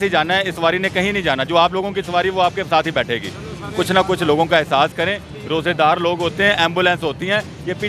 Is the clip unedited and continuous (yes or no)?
yes